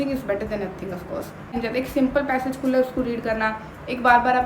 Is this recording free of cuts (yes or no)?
no